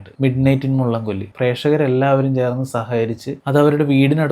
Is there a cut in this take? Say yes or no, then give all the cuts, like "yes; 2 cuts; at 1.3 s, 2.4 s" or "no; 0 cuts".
yes; 2 cuts; at 1.3 s, 3.3 s